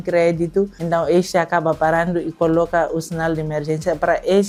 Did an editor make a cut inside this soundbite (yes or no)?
no